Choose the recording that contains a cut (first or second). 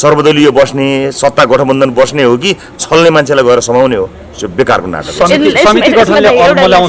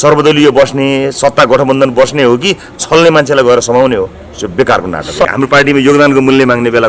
second